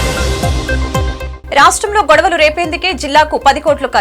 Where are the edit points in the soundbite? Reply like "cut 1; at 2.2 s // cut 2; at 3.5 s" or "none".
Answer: cut 1; at 1.3 s